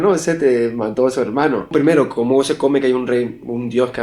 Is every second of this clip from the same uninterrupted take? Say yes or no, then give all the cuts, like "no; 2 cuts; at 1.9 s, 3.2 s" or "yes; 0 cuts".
no; 1 cut; at 1.7 s